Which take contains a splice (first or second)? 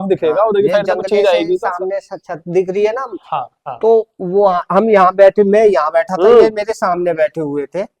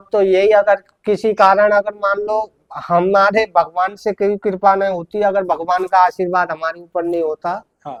first